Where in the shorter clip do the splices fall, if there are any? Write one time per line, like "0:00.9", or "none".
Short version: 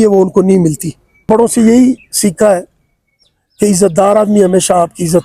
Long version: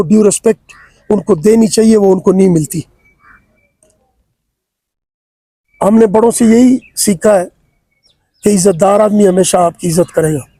0:01.3